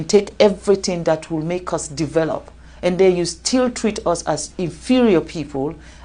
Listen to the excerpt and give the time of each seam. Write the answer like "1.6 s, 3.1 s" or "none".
none

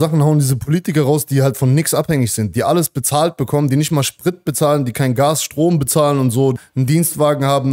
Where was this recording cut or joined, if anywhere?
6.6 s

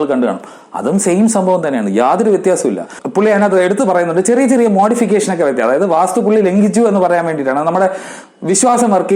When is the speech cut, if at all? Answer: 2.9 s

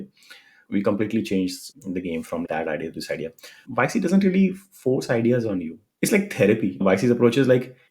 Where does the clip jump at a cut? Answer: 3.6 s, 6.8 s

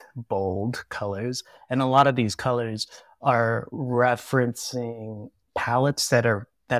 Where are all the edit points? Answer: none

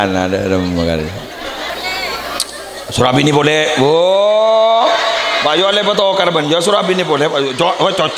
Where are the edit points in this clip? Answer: 1.7 s

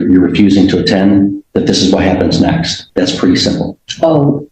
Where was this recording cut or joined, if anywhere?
2.8 s

